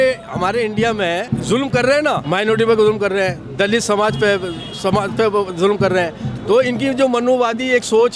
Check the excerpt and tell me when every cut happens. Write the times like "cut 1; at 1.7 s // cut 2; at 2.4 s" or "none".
cut 1; at 1.3 s // cut 2; at 2.2 s